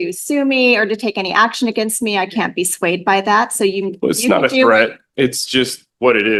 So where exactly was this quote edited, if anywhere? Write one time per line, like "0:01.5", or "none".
none